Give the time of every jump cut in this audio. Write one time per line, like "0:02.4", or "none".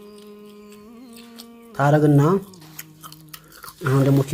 0:01.8

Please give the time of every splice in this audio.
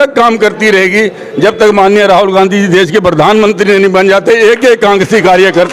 none

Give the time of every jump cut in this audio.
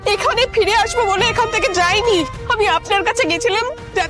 0:02.3

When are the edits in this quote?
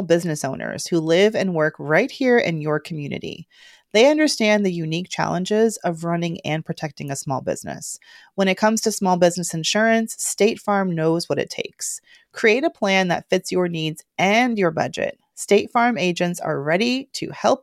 none

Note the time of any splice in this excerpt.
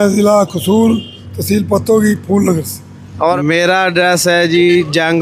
0:03.4

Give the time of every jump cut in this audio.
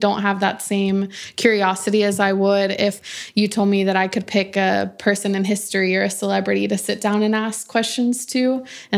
0:03.0

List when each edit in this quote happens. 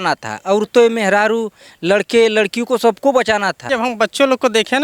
0:03.6

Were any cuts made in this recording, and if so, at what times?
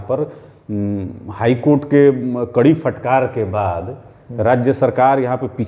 none

